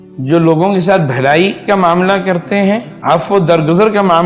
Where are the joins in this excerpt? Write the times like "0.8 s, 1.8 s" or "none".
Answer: 2.9 s